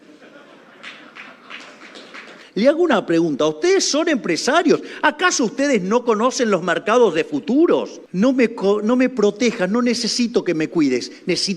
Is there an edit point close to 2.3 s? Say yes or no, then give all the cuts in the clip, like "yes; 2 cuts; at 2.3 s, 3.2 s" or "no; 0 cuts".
yes; 2 cuts; at 2.3 s, 8.0 s